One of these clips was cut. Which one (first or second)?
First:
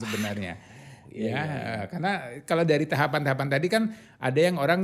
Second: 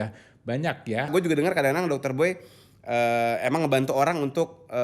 second